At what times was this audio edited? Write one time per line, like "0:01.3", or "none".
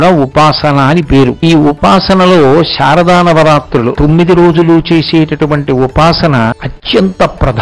0:01.4
0:03.9
0:06.7

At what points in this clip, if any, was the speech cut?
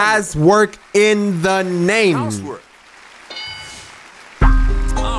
none

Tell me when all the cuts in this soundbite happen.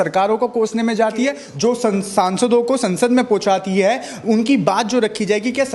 0:01.4

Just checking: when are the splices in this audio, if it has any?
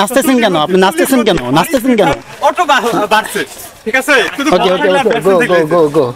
none

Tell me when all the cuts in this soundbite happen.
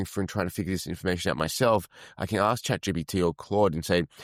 none

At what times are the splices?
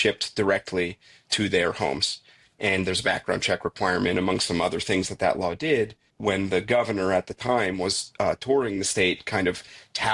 0:02.4
0:06.1

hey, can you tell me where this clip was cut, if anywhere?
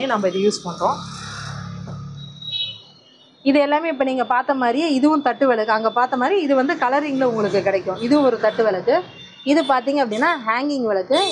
none

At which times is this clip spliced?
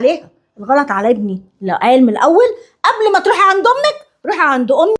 none

